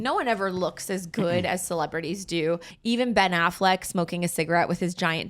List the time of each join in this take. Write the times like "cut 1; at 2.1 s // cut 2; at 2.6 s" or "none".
cut 1; at 2.6 s